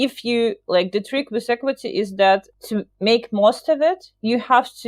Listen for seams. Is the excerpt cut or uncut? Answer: cut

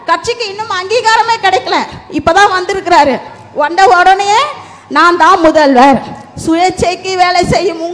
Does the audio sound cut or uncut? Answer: uncut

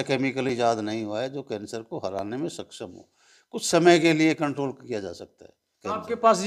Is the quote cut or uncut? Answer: uncut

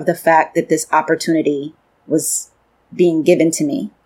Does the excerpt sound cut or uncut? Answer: uncut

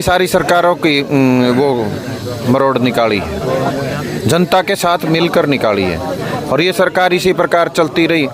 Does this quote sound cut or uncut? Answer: uncut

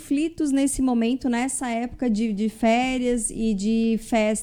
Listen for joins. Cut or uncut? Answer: uncut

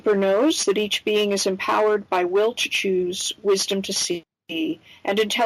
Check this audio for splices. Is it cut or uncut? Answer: uncut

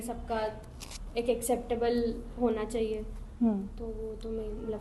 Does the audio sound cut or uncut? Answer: uncut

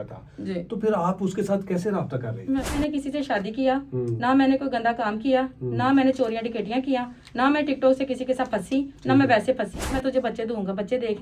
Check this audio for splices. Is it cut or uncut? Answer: cut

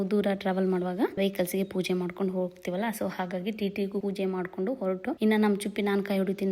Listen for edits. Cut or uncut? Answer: cut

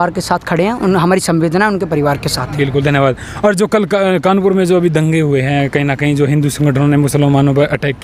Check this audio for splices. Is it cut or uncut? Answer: uncut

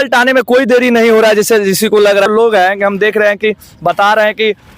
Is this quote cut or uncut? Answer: cut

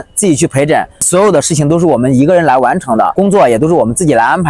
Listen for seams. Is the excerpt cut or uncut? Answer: cut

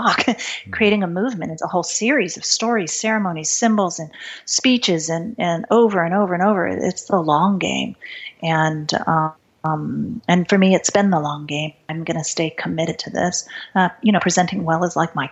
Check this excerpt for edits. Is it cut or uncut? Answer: cut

